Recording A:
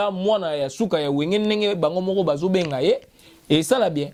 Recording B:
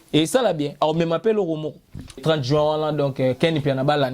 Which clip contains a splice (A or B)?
B